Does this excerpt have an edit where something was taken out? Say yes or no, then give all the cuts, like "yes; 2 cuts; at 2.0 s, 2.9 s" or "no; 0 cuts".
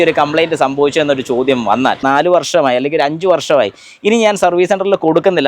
yes; 1 cut; at 2.0 s